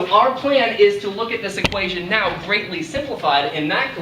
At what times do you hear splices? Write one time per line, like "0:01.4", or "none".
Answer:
0:01.7